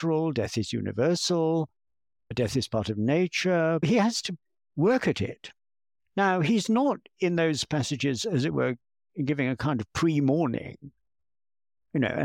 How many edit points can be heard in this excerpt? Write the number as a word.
one